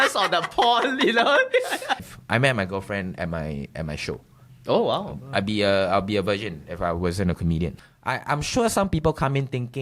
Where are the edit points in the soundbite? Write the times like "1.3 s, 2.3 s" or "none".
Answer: 2.1 s, 7.9 s

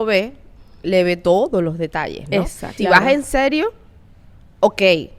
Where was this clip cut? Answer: 2.6 s

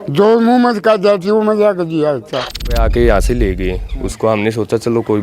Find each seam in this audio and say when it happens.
2.8 s

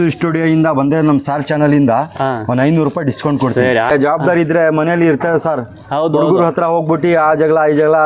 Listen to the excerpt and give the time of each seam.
3.9 s

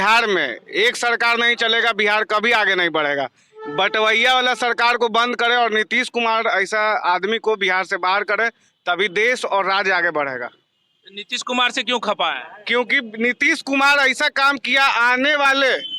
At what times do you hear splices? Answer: none

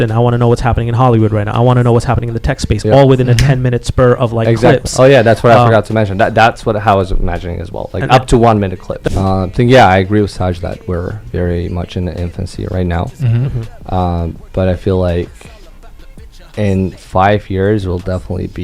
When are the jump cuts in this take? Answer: 8.9 s

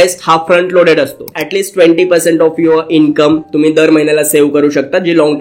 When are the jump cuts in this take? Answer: 1.3 s

